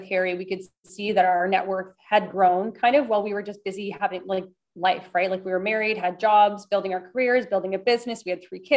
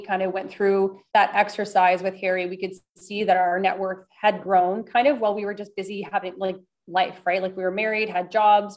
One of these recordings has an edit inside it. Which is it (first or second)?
second